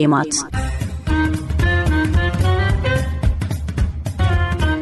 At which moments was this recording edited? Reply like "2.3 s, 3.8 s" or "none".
none